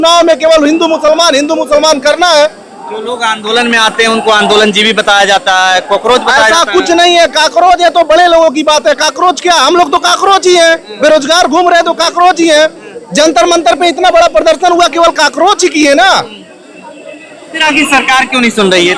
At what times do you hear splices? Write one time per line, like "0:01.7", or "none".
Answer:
none